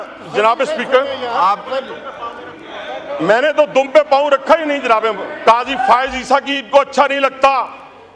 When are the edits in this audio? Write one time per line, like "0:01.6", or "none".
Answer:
0:05.3